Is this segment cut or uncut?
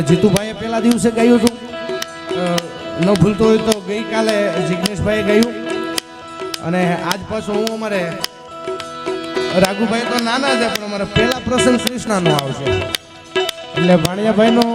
cut